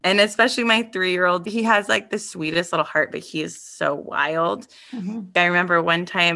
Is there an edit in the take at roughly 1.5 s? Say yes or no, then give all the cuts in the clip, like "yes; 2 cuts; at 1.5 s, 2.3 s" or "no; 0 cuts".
yes; 2 cuts; at 1.5 s, 5.3 s